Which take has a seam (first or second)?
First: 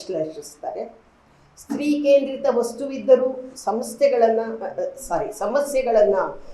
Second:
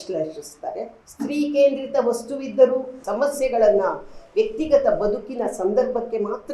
second